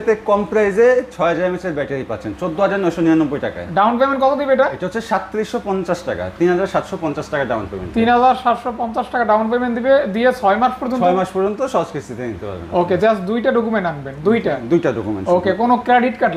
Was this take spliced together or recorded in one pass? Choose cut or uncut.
uncut